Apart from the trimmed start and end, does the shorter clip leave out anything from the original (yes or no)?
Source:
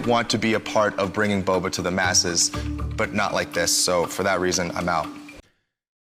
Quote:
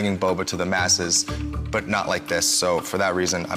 no